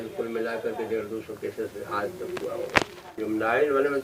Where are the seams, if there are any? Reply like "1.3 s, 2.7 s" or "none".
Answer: 3.0 s